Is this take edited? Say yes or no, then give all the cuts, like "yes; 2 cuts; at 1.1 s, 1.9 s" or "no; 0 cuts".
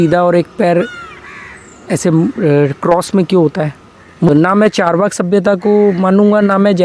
yes; 1 cut; at 4.3 s